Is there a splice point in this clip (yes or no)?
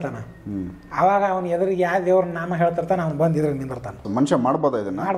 yes